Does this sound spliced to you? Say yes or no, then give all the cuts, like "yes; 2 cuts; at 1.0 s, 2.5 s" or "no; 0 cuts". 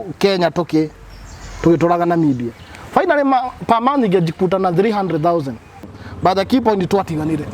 yes; 1 cut; at 5.9 s